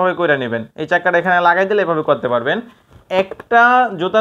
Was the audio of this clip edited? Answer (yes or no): no